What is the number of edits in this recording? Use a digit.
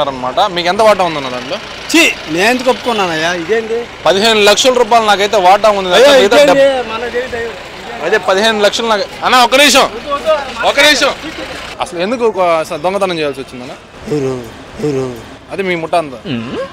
1